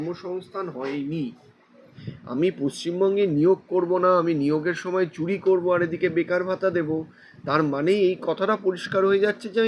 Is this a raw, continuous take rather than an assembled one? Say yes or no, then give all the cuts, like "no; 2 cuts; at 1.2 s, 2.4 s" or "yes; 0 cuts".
no; 1 cut; at 1.9 s